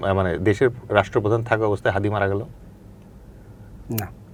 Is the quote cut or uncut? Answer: uncut